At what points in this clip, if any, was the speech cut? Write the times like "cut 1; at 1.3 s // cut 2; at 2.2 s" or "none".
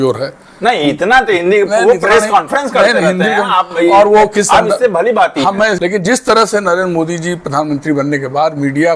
cut 1; at 5.8 s